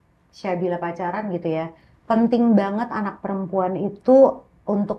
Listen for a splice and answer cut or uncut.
uncut